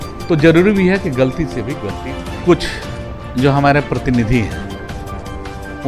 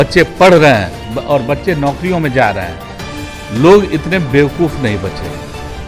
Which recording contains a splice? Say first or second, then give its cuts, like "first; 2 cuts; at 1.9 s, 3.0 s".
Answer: first; 1 cut; at 1.9 s